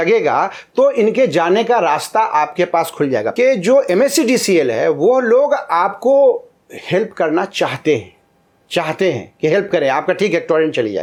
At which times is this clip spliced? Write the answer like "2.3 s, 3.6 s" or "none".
none